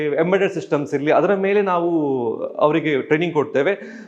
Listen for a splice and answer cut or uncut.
uncut